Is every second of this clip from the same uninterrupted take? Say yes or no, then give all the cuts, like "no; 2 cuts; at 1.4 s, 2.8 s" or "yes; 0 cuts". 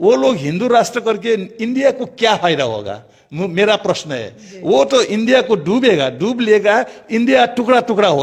yes; 0 cuts